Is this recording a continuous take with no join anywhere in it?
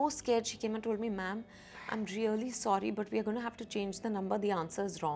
yes; 0 cuts

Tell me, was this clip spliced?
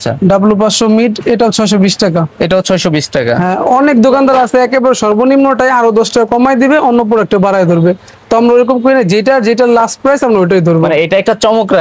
no; 0 cuts

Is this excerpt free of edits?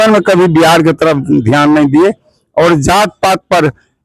yes; 0 cuts

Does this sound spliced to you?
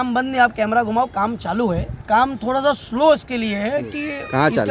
yes; 1 cut; at 1.9 s

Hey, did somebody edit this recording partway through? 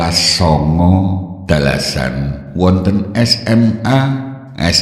yes; 3 cuts; at 1.3 s, 2.4 s, 3.6 s

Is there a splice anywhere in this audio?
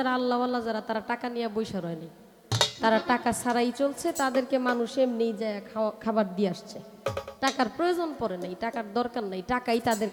no; 0 cuts

